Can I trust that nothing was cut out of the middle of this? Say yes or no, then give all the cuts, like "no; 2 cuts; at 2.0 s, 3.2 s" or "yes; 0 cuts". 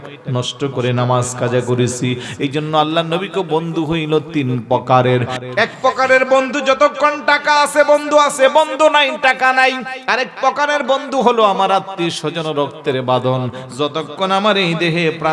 no; 1 cut; at 5.4 s